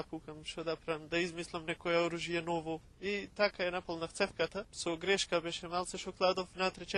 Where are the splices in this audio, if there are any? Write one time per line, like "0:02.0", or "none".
0:02.9
0:04.7